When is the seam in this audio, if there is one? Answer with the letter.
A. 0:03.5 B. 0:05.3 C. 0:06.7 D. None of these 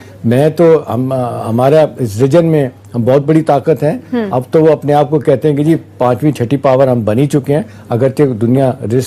D